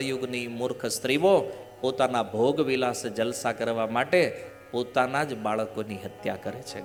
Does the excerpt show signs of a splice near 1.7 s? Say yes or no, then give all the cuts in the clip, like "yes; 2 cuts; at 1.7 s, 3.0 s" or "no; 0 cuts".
no; 0 cuts